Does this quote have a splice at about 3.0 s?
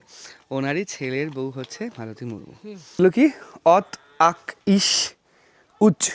yes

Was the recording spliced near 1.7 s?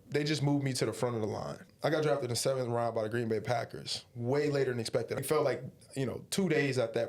yes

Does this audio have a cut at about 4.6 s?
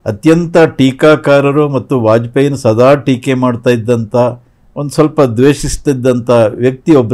no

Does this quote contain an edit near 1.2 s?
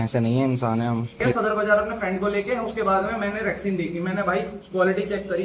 yes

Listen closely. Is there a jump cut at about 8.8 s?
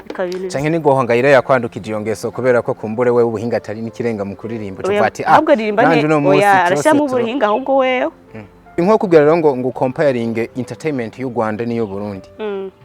yes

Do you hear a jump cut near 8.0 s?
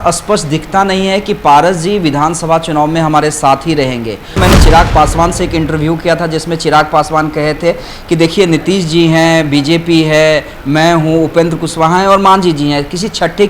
no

